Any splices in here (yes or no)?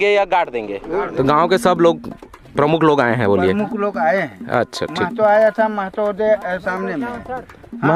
yes